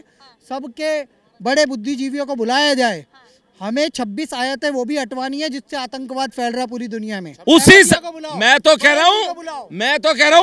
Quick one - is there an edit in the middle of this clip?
yes; 1 cut; at 7.3 s

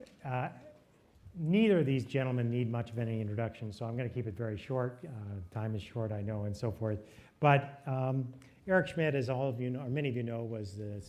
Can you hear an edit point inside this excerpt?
no; 0 cuts

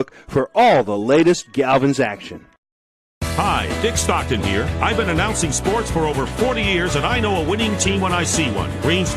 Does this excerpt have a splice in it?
yes; 2 cuts; at 4.2 s, 6.7 s

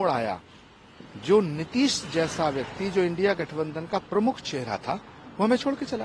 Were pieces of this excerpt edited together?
no; 0 cuts

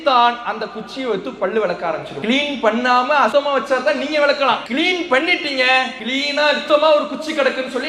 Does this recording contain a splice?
yes; 4 cuts; at 2.1 s, 3.3 s, 4.7 s, 6.3 s

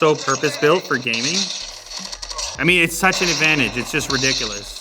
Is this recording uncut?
no; 1 cut; at 2.6 s

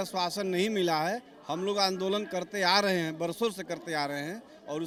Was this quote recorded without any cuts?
yes; 0 cuts

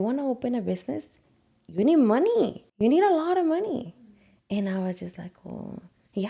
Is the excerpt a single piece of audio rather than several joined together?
no; 1 cut; at 2.6 s

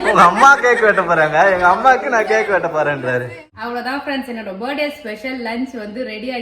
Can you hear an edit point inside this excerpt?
yes; 1 cut; at 3.5 s

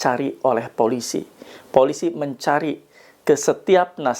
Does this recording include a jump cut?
no; 0 cuts

